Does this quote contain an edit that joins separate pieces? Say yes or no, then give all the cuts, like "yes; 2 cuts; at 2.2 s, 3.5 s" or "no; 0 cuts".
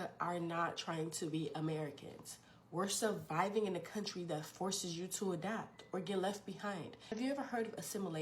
yes; 1 cut; at 7.0 s